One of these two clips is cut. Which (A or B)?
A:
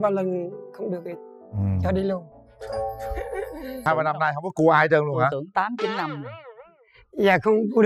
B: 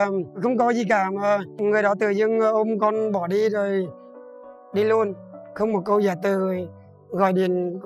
A